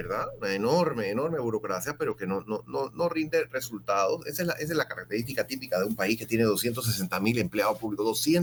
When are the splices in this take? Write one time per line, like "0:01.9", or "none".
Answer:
none